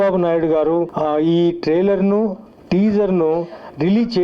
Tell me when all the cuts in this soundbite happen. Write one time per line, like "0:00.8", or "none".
0:00.9